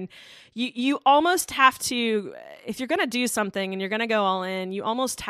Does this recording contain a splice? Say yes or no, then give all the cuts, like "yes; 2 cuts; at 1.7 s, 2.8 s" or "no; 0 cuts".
no; 0 cuts